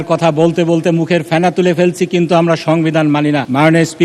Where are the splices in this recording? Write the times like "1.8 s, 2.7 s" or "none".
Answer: none